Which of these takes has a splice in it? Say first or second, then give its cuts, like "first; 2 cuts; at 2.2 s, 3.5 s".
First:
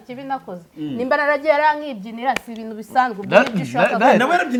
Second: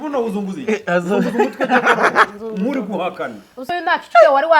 second; 1 cut; at 3.6 s